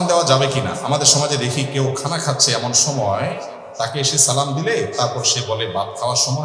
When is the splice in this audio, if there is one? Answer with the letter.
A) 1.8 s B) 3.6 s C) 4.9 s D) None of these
D